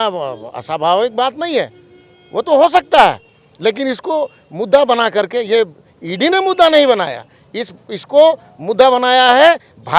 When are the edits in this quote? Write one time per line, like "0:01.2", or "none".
none